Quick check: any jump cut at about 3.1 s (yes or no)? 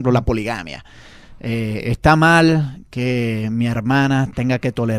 no